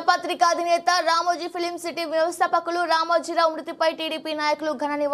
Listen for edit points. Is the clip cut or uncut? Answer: uncut